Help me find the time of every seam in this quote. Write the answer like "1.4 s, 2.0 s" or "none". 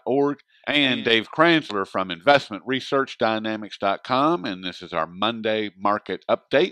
none